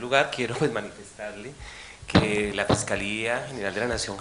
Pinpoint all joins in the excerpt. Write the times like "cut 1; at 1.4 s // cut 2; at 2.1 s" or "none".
cut 1; at 2.2 s